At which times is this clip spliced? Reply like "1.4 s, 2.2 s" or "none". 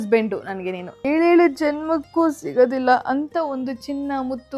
1.0 s